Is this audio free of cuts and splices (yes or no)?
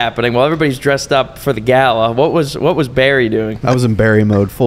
no